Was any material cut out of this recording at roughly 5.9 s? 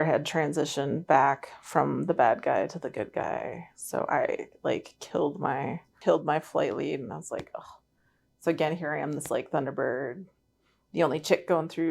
yes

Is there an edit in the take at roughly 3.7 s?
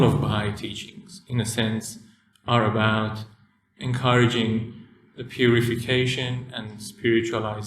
yes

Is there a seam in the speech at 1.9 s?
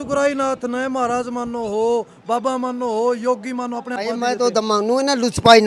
no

